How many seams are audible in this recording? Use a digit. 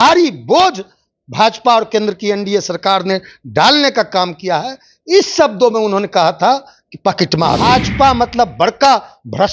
1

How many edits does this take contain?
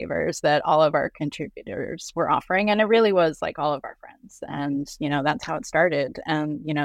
2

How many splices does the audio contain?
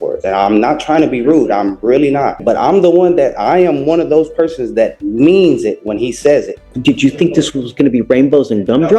2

